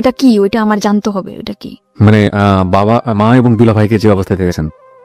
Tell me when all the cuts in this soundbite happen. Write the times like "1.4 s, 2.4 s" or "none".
none